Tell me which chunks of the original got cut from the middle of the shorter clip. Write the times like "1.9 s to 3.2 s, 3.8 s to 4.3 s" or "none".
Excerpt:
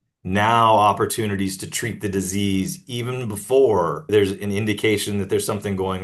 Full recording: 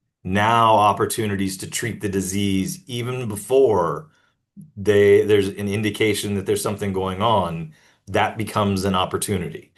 4.1 s to 5.3 s